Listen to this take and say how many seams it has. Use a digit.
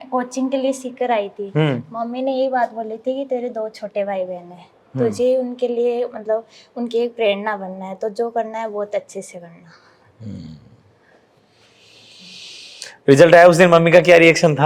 0